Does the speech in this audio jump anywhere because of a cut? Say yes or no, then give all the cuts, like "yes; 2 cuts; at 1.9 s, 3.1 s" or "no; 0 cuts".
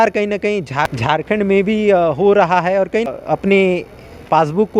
yes; 2 cuts; at 0.9 s, 3.1 s